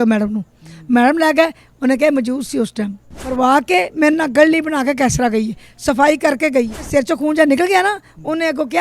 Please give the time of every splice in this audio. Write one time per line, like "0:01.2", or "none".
0:03.3
0:06.8

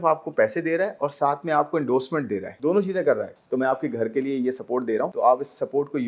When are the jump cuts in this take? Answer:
0:02.5
0:03.3
0:05.1

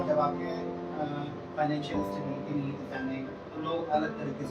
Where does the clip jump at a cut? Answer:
0:03.4

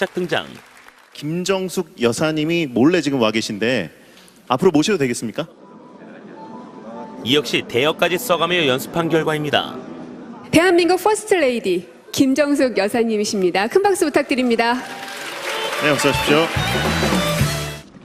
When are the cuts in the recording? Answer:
0:02.6

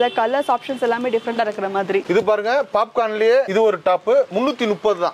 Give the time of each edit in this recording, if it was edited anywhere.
none

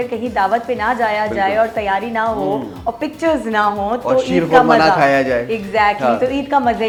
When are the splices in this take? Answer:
none

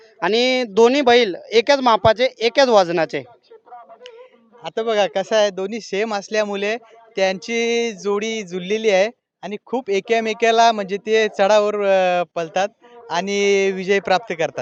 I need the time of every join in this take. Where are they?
none

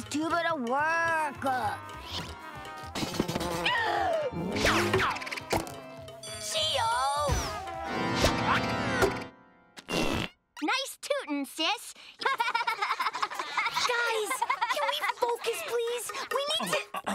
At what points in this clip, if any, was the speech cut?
none

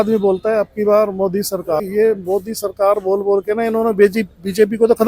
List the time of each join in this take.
0:01.8

